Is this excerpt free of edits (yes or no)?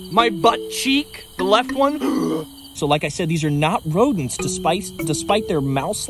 no